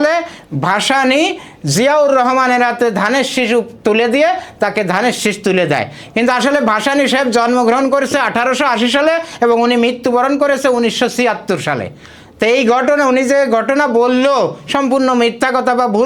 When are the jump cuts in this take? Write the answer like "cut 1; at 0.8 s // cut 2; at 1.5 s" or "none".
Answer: none